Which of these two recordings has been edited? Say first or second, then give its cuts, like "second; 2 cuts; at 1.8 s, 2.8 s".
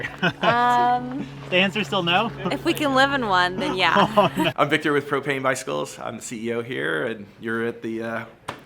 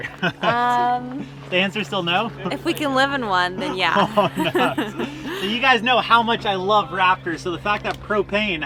first; 1 cut; at 4.5 s